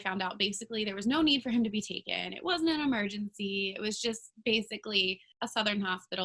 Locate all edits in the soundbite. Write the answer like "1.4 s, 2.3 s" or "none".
5.3 s